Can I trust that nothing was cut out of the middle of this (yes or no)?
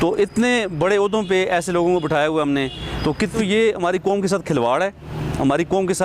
no